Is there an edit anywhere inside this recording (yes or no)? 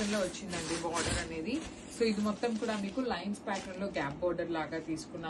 no